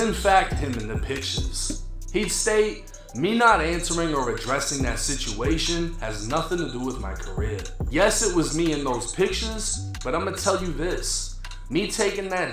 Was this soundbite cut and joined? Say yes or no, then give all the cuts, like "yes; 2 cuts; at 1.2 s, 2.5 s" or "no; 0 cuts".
yes; 1 cut; at 7.8 s